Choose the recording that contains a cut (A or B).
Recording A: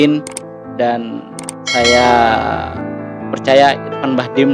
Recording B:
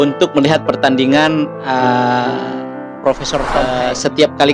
B